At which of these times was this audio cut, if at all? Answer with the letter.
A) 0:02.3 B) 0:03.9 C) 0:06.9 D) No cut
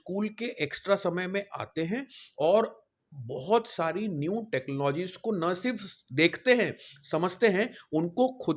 D